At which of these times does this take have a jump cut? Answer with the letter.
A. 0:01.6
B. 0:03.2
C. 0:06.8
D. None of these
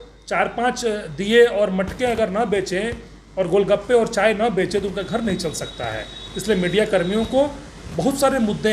D